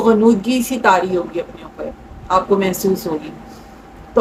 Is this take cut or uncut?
uncut